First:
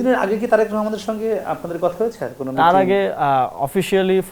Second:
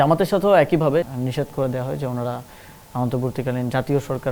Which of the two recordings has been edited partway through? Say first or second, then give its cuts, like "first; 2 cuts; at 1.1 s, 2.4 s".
second; 1 cut; at 1.1 s